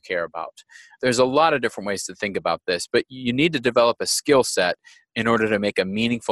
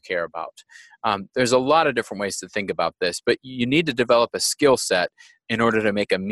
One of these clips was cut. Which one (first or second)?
first